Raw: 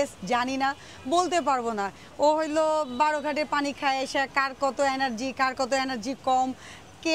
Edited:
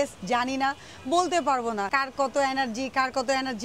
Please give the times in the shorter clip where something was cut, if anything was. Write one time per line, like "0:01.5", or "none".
0:01.9